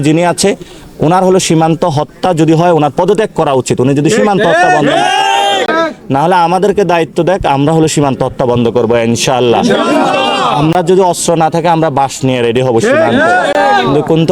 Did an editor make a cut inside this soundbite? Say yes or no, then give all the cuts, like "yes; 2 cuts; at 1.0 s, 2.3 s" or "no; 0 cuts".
no; 0 cuts